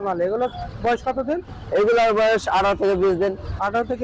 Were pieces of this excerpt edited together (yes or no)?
no